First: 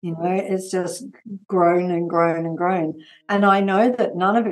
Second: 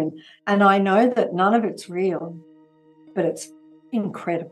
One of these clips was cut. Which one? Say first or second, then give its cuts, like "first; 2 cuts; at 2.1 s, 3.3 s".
second; 1 cut; at 3.1 s